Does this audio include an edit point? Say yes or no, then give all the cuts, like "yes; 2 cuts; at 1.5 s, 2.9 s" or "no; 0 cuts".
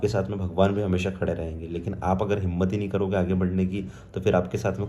no; 0 cuts